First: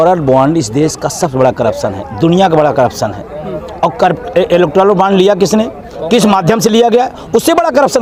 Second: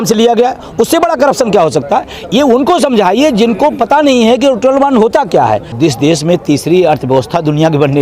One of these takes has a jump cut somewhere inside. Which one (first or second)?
second